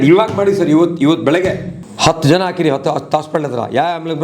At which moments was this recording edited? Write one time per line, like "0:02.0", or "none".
none